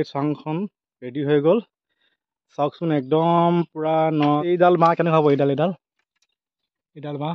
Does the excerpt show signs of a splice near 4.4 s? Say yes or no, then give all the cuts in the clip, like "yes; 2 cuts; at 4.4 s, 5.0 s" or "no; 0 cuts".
yes; 1 cut; at 4.4 s